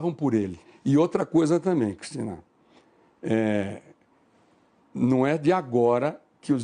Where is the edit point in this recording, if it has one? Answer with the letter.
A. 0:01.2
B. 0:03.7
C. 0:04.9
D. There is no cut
B